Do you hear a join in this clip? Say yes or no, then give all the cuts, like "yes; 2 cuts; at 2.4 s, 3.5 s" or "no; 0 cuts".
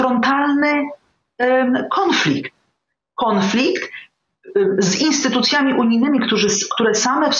no; 0 cuts